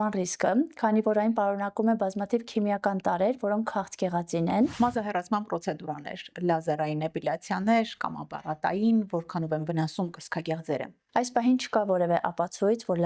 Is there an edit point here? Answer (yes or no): yes